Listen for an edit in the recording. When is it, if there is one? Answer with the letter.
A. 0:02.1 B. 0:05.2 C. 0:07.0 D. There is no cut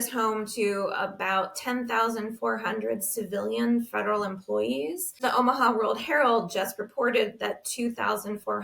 B